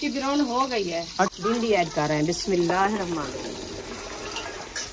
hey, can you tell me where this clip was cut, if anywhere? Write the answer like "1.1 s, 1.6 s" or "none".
1.4 s

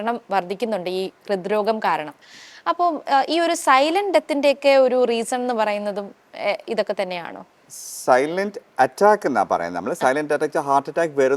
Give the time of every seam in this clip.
none

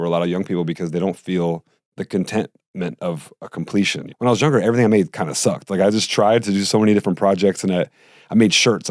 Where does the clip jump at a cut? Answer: 1.8 s, 4.0 s

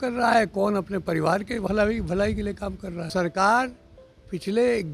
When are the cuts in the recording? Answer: 3.1 s

